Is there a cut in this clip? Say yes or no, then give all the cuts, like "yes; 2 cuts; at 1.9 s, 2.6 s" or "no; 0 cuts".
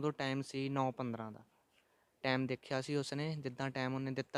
no; 0 cuts